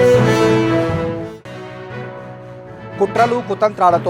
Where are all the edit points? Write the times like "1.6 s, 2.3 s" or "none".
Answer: 2.3 s